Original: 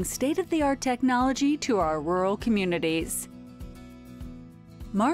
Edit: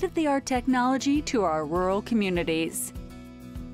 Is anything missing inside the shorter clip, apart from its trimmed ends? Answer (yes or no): yes